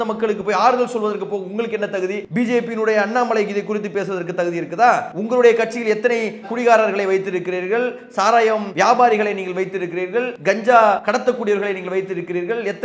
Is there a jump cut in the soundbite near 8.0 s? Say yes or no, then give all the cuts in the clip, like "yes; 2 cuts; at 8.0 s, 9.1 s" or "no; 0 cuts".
no; 4 cuts; at 2.2 s, 5.1 s, 10.3 s, 11.0 s